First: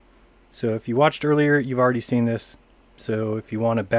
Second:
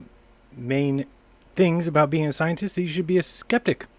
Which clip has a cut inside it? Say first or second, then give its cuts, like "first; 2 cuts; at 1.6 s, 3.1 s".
first; 1 cut; at 2.7 s